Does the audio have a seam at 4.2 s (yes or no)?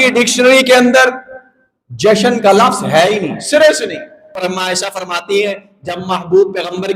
yes